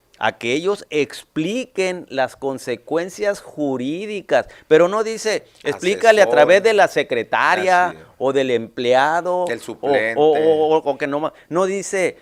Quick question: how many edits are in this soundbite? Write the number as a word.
zero